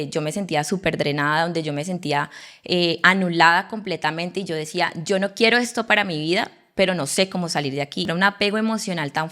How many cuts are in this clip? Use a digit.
1